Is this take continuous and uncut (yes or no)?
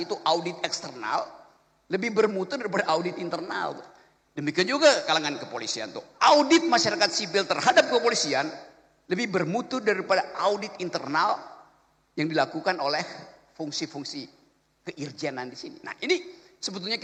yes